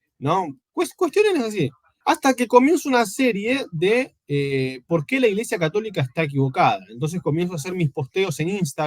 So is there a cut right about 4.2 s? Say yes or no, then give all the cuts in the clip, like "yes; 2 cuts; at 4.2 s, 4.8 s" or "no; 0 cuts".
no; 1 cut; at 1.8 s